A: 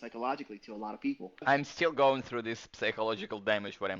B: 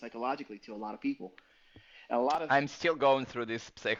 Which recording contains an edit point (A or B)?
A